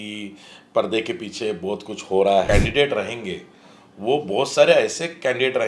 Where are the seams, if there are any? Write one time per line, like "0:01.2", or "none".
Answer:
0:02.5